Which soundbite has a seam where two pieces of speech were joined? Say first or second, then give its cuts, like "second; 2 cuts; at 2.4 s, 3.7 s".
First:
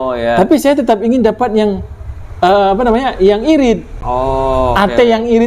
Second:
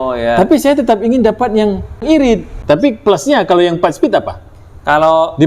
second; 1 cut; at 2.4 s